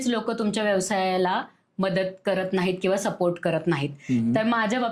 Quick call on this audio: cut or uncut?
uncut